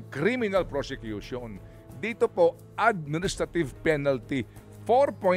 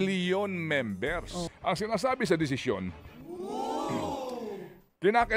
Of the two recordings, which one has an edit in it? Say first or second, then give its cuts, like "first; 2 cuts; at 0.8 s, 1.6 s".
second; 1 cut; at 1.4 s